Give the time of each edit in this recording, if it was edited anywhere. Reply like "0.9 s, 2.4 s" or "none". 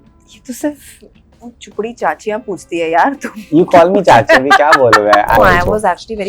5.4 s